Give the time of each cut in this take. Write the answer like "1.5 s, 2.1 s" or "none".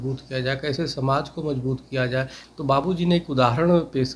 2.4 s